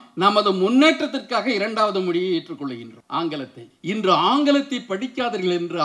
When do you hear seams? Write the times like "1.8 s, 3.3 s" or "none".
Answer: none

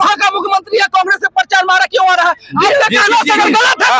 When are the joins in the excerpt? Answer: none

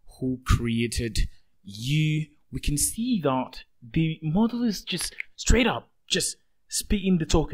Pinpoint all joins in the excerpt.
none

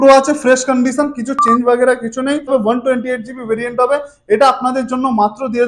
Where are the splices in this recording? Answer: 2.5 s

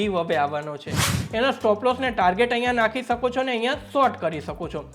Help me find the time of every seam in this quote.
1.1 s

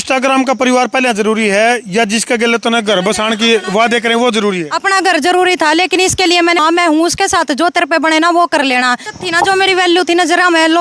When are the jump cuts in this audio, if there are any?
6.6 s, 9.0 s

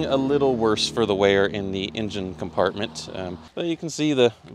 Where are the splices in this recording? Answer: 3.4 s

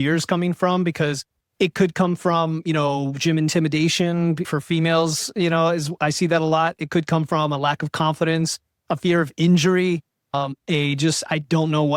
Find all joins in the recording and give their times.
none

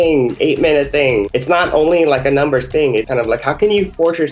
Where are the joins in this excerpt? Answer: 1.3 s, 3.0 s

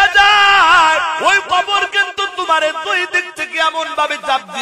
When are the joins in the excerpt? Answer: 1.2 s

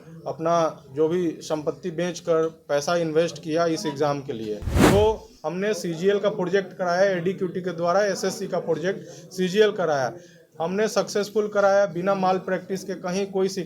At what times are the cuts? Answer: 4.7 s

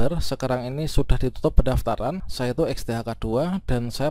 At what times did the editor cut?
2.3 s

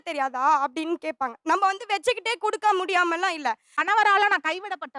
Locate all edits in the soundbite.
3.7 s

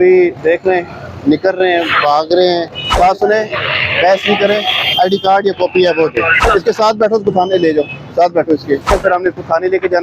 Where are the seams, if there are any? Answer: 2.9 s, 6.4 s, 8.9 s

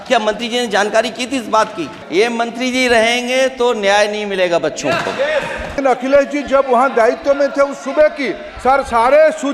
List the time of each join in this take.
2.0 s, 5.7 s

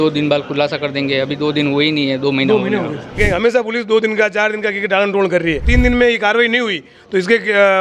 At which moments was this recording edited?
3.2 s, 5.7 s

